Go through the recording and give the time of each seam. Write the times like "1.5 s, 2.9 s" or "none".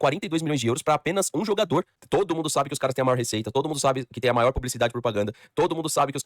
2.0 s